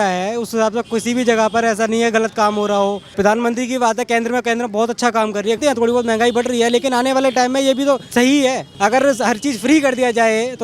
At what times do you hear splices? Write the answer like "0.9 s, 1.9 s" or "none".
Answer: 3.1 s, 5.6 s, 8.2 s